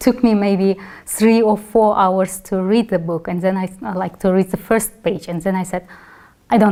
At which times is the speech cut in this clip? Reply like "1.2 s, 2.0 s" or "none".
none